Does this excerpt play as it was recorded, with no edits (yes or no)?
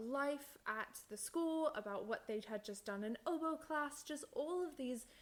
yes